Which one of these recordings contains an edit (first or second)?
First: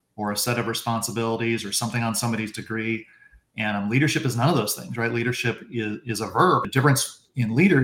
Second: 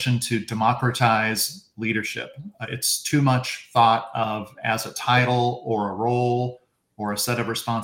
first